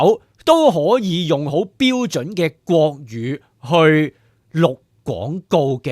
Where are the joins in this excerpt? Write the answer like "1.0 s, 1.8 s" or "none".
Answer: none